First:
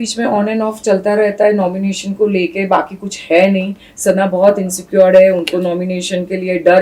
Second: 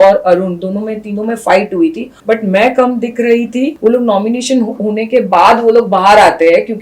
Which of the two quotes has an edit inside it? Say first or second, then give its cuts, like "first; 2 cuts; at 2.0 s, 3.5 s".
second; 2 cuts; at 2.1 s, 3.7 s